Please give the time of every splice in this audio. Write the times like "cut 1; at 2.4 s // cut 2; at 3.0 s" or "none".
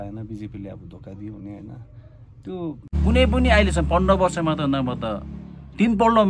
cut 1; at 2.9 s